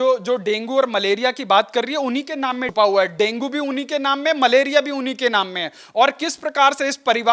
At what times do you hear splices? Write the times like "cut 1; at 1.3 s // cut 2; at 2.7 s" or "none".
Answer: cut 1; at 2.7 s